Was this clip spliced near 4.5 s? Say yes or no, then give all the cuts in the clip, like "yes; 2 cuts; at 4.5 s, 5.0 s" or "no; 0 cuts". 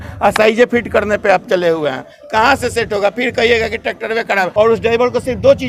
yes; 1 cut; at 4.5 s